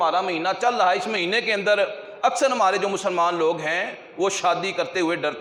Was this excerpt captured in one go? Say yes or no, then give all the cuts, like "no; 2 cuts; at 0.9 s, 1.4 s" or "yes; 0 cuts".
yes; 0 cuts